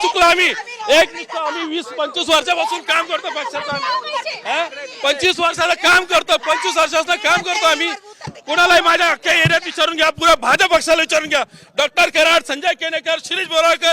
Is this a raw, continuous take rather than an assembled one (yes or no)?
yes